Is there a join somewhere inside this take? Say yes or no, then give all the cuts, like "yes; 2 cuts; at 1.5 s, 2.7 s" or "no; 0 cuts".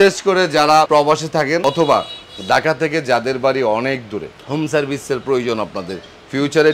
yes; 1 cut; at 1.2 s